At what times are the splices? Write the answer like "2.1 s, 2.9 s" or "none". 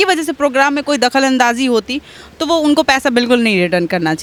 none